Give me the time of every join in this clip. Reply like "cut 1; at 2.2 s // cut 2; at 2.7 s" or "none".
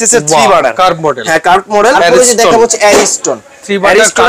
cut 1; at 2.0 s